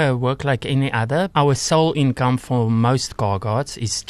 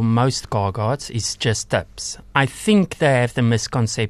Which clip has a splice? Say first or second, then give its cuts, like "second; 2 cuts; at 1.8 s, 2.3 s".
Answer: first; 1 cut; at 1.3 s